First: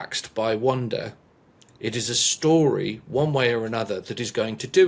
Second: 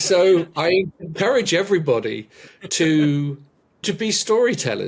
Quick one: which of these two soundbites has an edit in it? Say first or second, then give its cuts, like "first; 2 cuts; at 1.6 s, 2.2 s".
second; 2 cuts; at 1.1 s, 3.8 s